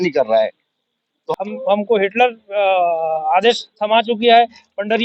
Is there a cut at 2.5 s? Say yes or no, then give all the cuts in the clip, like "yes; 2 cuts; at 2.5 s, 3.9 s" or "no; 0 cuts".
no; 1 cut; at 1.2 s